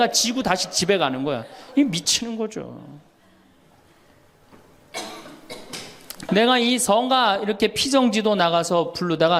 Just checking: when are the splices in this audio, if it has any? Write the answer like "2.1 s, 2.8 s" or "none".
6.3 s